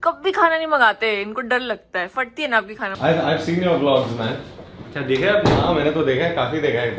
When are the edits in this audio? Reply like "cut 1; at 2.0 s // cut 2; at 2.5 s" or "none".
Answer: cut 1; at 2.9 s